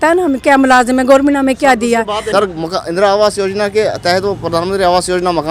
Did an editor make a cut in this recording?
yes; 1 cut; at 2.2 s

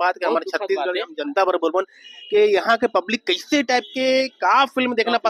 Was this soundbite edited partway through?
no; 0 cuts

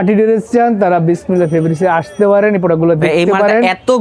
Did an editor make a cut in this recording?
no; 0 cuts

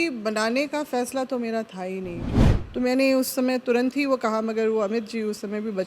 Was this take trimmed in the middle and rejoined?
yes; 1 cut; at 2.3 s

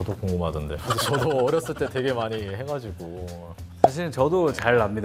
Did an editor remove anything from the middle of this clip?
no; 0 cuts

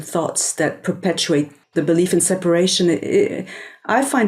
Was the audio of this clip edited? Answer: yes; 1 cut; at 1.6 s

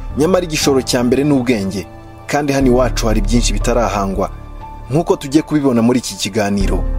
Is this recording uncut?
yes; 0 cuts

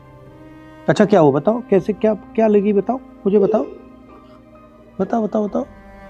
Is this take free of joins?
yes; 0 cuts

